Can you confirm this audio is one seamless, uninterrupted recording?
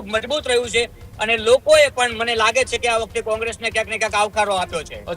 yes; 0 cuts

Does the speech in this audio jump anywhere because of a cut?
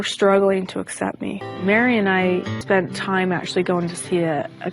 yes; 2 cuts; at 1.3 s, 2.5 s

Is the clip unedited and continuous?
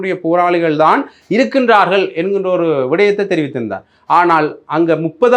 yes; 0 cuts

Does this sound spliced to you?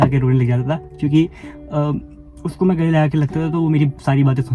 no; 0 cuts

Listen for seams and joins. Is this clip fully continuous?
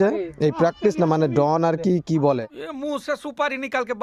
yes; 0 cuts

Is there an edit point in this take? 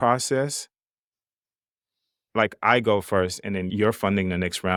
no; 0 cuts

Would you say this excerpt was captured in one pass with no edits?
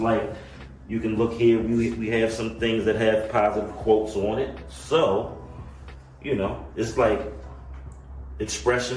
yes; 0 cuts

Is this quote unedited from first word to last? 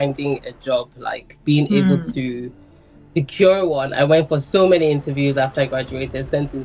yes; 0 cuts

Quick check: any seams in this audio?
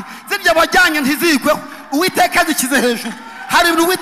no; 0 cuts

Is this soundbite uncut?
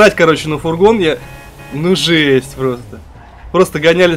yes; 0 cuts

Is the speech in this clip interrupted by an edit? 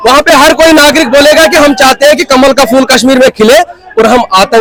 no; 0 cuts

